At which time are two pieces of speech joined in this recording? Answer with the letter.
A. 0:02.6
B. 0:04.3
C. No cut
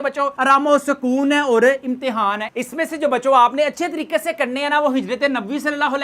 A